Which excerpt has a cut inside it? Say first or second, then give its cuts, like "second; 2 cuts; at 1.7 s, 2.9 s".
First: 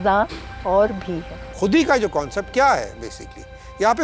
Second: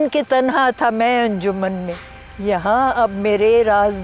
first; 1 cut; at 1.4 s